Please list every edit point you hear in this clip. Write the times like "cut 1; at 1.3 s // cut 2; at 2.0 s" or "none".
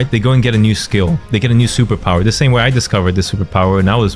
cut 1; at 1.2 s